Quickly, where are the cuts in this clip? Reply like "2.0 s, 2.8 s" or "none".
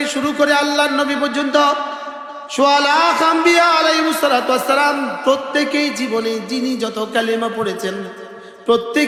none